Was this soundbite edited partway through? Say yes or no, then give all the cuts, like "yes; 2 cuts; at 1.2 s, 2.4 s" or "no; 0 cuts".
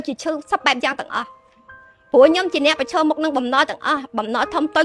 no; 0 cuts